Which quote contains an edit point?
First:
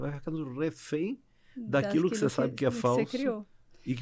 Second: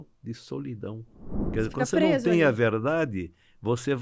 second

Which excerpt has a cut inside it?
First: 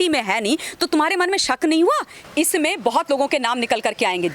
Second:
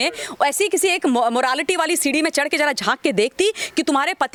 first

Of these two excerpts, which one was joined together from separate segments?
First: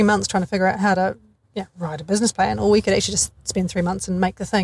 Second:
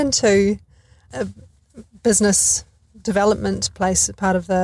second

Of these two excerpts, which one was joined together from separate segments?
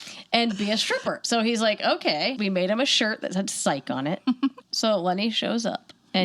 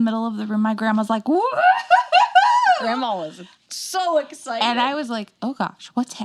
first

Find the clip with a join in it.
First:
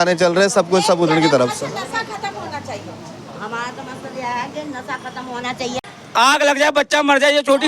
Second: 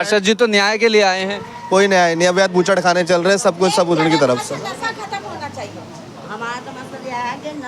first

